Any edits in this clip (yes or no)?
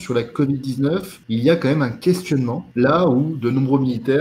yes